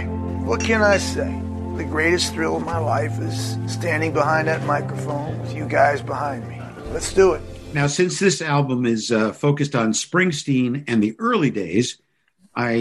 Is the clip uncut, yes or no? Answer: yes